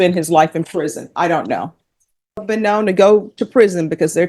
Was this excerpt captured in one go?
no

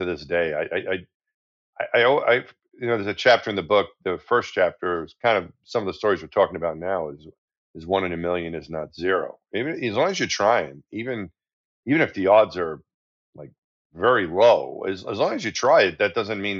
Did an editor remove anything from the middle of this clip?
no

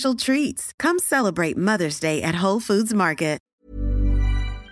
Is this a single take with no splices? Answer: no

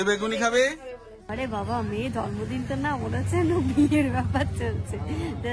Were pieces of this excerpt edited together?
yes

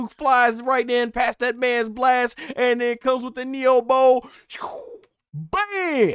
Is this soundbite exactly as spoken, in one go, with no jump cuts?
yes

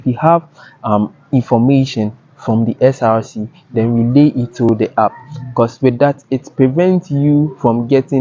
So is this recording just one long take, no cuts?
yes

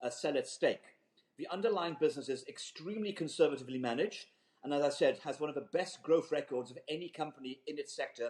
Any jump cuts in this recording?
no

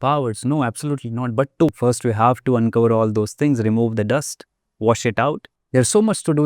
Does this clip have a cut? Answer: yes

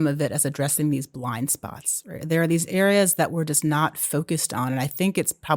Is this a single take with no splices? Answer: yes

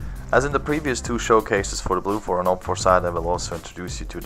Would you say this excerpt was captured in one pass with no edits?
no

